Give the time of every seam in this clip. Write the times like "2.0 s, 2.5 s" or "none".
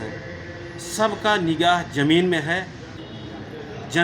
2.9 s